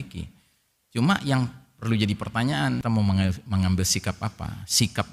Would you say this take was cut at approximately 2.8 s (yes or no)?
yes